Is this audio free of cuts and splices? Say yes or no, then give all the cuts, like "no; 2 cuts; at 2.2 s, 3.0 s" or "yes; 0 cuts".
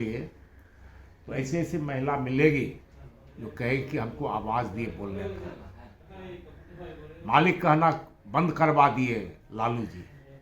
yes; 0 cuts